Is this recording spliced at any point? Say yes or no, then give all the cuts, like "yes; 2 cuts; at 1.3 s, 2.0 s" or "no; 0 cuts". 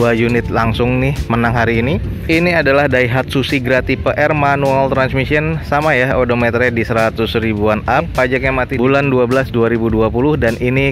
no; 0 cuts